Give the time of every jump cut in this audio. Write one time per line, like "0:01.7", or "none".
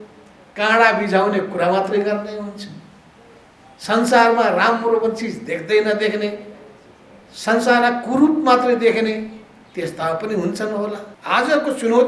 0:11.1